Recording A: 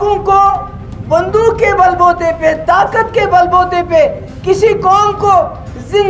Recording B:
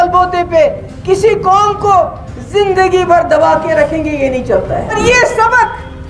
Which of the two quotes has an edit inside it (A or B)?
B